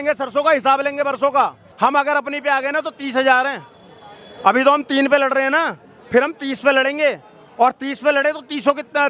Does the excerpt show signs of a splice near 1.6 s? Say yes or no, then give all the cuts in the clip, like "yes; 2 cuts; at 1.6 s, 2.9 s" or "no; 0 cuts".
yes; 1 cut; at 1.6 s